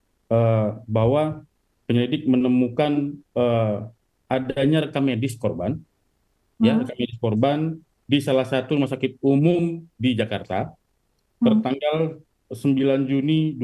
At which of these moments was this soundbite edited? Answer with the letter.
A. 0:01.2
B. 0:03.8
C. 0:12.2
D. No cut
D